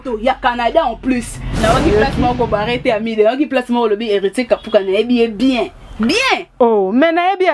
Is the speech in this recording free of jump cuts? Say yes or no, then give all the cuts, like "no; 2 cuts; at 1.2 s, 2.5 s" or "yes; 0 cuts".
no; 1 cut; at 1.5 s